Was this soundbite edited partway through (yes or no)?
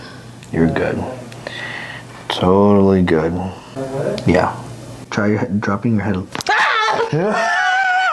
no